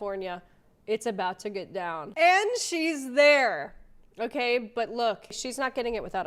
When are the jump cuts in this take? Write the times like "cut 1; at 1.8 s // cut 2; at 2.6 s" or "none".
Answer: cut 1; at 2.1 s